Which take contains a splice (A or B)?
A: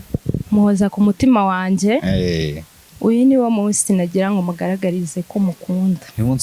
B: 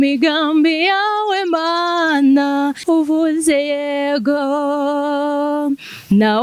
B